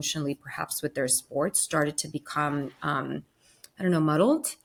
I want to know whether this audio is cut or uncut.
uncut